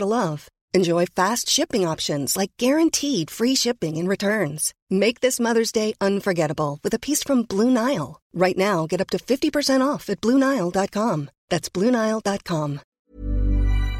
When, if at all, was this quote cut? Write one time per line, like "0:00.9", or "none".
0:12.9